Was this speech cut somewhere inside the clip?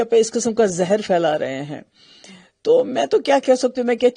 no; 0 cuts

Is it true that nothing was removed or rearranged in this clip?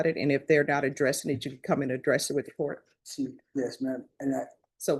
yes; 0 cuts

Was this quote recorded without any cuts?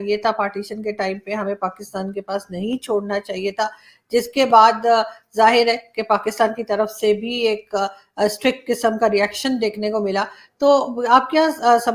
yes; 0 cuts

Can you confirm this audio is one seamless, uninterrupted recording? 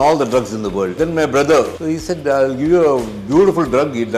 no; 2 cuts; at 0.9 s, 1.8 s

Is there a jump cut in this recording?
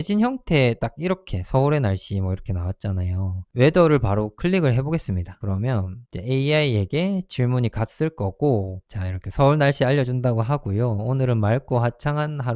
no; 0 cuts

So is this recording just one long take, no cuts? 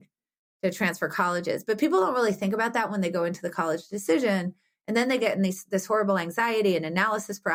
yes; 0 cuts

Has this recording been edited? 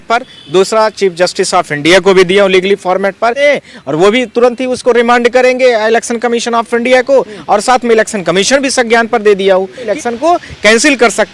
yes; 2 cuts; at 3.4 s, 9.9 s

